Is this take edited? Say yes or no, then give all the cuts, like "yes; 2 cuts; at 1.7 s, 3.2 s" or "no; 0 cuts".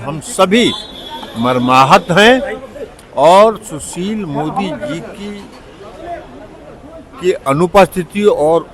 no; 0 cuts